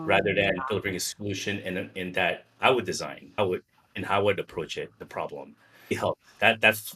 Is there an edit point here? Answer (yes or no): yes